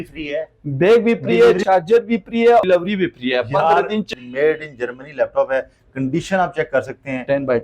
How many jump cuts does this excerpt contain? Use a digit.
3